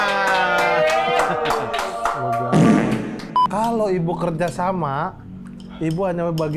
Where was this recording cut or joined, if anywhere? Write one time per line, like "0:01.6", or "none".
0:03.3